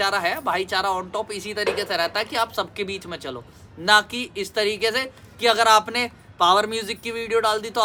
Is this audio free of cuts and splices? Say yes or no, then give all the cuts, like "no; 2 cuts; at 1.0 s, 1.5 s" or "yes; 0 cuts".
yes; 0 cuts